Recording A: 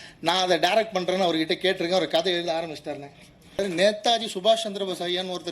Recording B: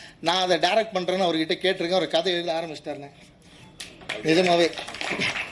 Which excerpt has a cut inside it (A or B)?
A